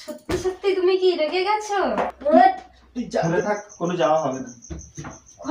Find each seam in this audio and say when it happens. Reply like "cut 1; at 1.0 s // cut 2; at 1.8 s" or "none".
cut 1; at 2.1 s // cut 2; at 3.3 s